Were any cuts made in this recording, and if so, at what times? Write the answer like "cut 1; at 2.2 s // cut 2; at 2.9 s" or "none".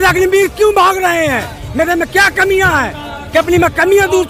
none